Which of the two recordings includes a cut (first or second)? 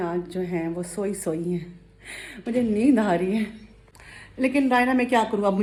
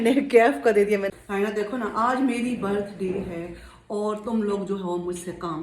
second